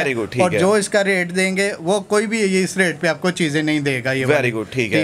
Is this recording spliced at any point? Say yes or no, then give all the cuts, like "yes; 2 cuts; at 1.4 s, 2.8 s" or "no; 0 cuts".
no; 0 cuts